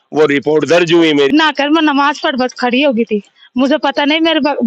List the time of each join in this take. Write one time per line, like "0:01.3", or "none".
0:01.3